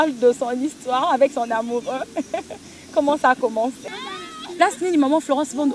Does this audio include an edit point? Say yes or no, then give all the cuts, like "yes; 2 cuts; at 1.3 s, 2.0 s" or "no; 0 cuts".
yes; 1 cut; at 3.9 s